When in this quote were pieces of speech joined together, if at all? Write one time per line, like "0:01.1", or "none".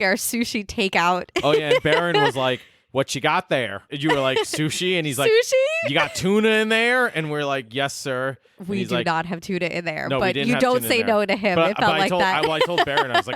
0:03.8